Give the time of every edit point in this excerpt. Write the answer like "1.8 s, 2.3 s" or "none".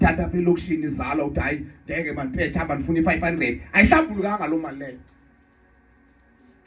none

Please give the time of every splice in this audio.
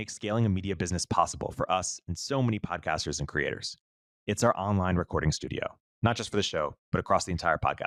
none

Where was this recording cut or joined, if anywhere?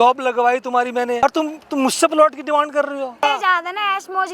1.2 s, 3.2 s

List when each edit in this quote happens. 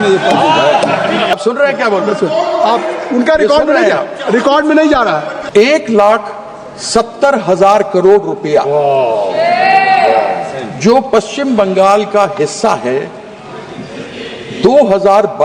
1.3 s, 5.4 s

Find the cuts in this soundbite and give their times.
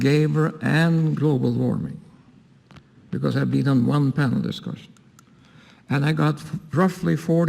4.1 s

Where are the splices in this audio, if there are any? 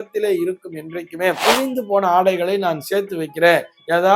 1.4 s

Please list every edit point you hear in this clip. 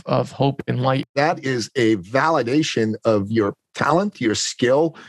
1.1 s

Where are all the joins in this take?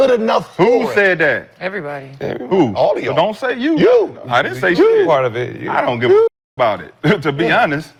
none

